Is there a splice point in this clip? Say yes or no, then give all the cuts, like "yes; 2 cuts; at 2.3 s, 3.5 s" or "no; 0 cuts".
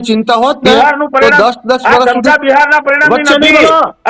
no; 0 cuts